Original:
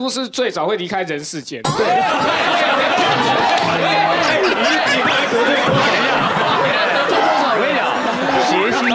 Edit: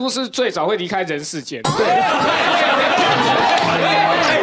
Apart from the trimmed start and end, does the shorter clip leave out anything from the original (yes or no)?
no